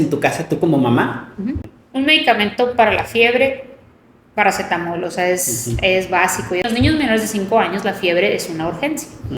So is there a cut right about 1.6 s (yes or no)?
yes